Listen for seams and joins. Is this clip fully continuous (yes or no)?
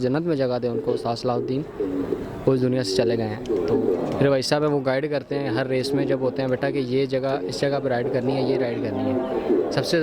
no